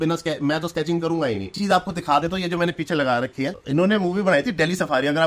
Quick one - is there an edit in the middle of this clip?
yes; 2 cuts; at 1.6 s, 3.6 s

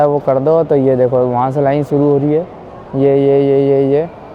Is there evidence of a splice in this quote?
no; 0 cuts

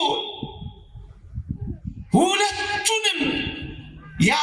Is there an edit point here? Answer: no; 0 cuts

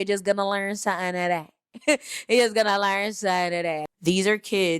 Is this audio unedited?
no; 1 cut; at 3.9 s

